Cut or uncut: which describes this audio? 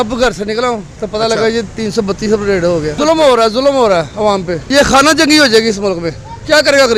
uncut